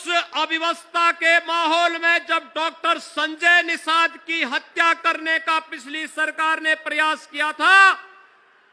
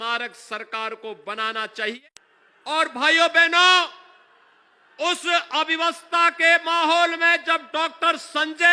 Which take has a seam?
second; 1 cut; at 2.0 s

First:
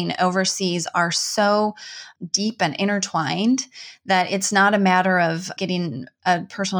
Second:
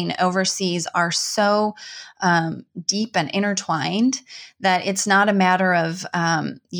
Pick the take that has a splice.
first; 2 cuts; at 2.1 s, 5.5 s

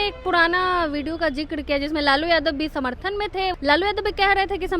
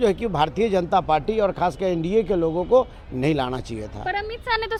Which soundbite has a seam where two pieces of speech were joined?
first; 1 cut; at 3.6 s

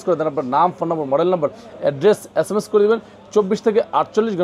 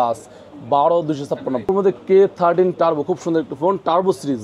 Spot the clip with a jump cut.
second; 1 cut; at 1.6 s

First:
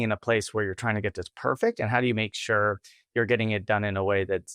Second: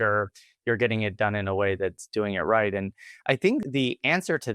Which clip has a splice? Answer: second; 1 cut; at 3.6 s

